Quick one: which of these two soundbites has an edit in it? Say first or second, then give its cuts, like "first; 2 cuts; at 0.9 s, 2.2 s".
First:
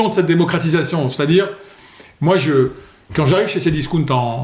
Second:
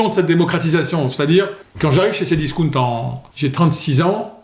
second; 2 cuts; at 1.6 s, 3.2 s